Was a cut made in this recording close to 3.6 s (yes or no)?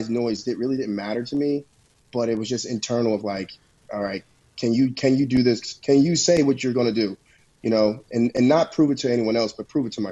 no